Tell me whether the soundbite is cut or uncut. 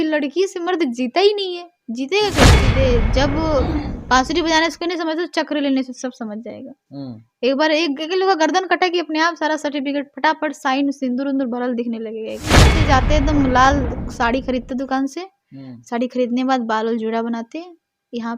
cut